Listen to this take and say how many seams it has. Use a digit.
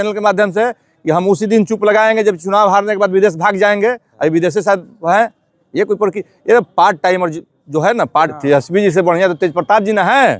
1